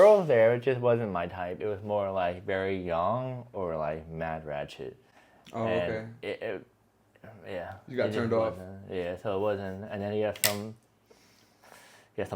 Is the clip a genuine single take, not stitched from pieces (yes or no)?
yes